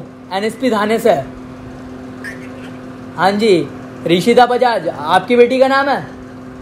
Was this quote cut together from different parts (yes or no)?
no